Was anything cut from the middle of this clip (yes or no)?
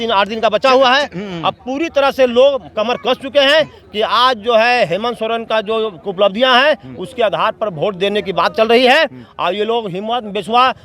no